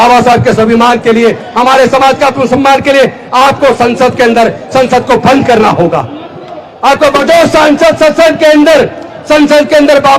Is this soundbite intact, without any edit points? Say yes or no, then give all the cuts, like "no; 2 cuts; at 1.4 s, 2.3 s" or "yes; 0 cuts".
no; 1 cut; at 7.2 s